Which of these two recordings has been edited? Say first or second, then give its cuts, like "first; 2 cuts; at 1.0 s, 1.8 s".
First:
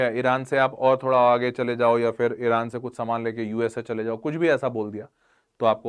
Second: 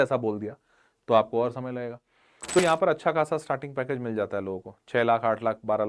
second; 1 cut; at 2.6 s